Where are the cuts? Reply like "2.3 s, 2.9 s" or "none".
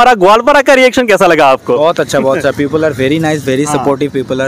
none